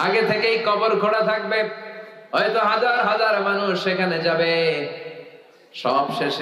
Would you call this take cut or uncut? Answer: uncut